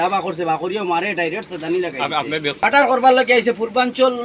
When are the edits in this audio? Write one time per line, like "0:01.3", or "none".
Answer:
0:02.6